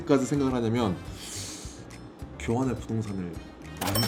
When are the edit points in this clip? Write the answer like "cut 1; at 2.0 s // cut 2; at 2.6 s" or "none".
none

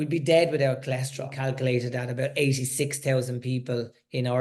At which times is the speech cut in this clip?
cut 1; at 1.4 s

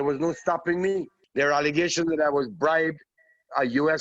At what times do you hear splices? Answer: cut 1; at 1.2 s

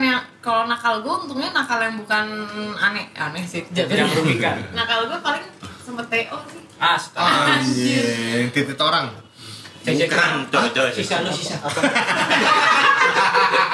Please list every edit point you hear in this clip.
none

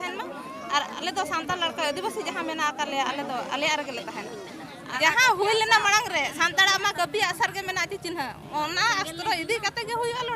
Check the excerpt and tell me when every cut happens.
cut 1; at 4.8 s

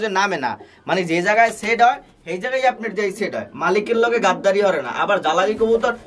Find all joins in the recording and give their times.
none

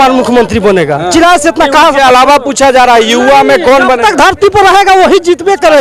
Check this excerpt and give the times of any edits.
none

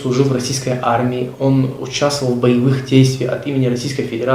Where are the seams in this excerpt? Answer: none

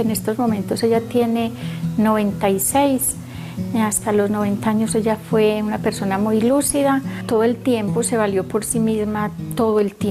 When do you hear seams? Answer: none

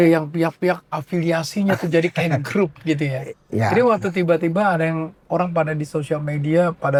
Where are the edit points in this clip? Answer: none

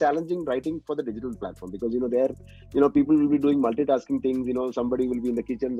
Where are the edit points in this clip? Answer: none

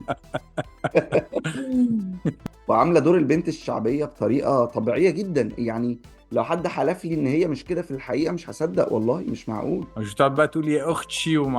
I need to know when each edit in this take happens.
cut 1; at 2.3 s

